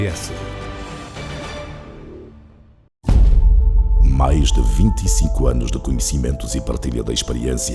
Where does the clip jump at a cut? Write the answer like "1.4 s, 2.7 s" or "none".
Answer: 3.0 s